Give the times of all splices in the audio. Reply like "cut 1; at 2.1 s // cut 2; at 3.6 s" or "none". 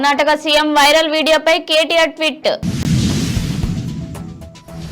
cut 1; at 2.8 s // cut 2; at 3.9 s